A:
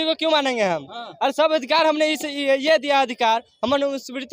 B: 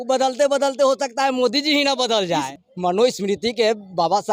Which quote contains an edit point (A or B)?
B